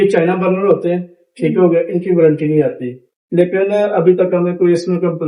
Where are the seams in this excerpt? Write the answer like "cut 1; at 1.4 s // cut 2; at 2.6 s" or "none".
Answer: none

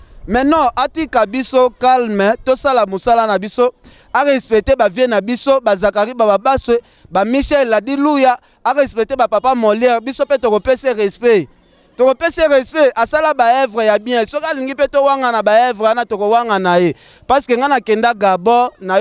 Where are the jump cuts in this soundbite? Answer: none

